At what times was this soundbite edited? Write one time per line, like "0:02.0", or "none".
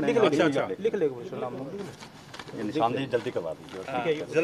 none

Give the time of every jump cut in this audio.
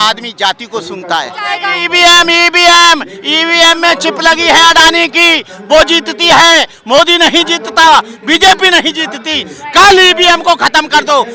0:01.6

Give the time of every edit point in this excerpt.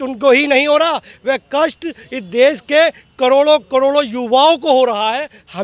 none

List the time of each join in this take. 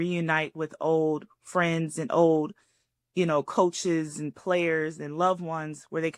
none

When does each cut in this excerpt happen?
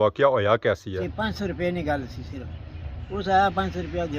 0:01.0

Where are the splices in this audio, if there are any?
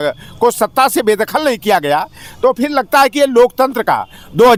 none

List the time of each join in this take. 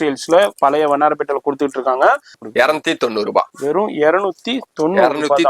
0:02.4

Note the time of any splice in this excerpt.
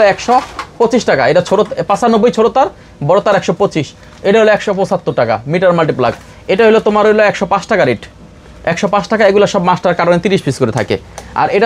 none

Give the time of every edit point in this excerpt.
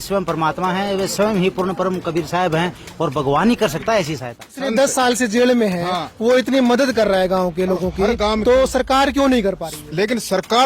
0:04.6

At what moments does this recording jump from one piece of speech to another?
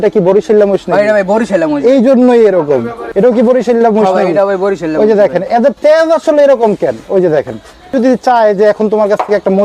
0:03.0
0:07.9

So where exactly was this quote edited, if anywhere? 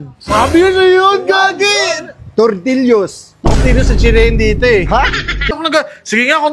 0:05.6

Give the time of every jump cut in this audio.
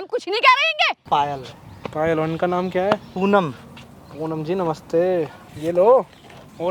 0:01.0
0:05.4

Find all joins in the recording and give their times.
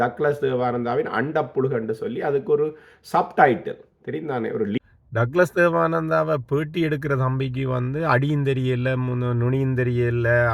0:04.8

